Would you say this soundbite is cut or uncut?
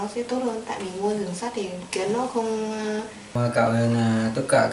cut